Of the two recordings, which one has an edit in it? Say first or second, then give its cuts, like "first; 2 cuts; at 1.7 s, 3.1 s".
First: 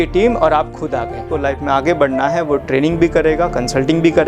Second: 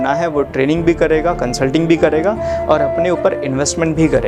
first; 1 cut; at 1.2 s